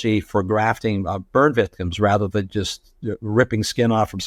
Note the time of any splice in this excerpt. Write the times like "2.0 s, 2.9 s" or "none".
none